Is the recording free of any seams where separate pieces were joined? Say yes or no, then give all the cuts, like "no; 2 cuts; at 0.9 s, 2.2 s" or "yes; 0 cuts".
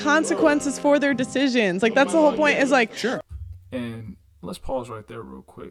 yes; 0 cuts